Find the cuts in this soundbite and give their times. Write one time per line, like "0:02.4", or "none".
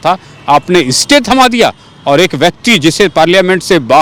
none